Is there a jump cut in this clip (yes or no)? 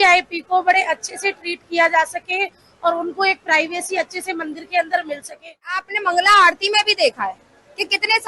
yes